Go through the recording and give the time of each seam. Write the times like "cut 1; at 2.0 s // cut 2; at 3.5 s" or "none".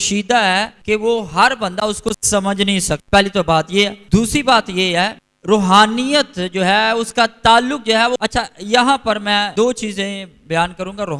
cut 1; at 8.2 s // cut 2; at 9.5 s